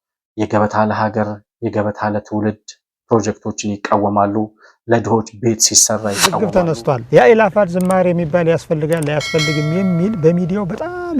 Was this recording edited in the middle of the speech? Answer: yes; 1 cut; at 6.4 s

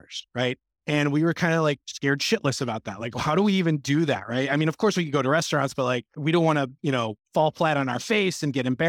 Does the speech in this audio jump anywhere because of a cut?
yes; 2 cuts; at 6.1 s, 7.2 s

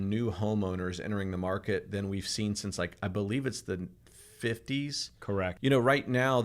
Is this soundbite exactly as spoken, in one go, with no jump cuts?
no; 1 cut; at 5.5 s

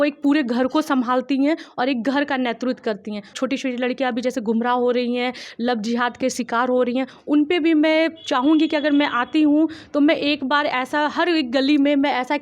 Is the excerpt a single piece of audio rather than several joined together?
no; 1 cut; at 3.4 s

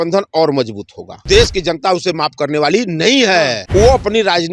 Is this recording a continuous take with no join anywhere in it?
no; 2 cuts; at 1.3 s, 3.6 s

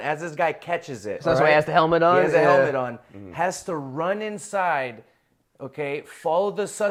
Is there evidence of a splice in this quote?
no; 0 cuts

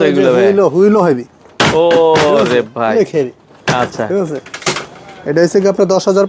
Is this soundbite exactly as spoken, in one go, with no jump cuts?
yes; 0 cuts

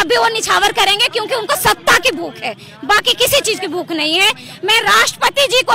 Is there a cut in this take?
no; 0 cuts

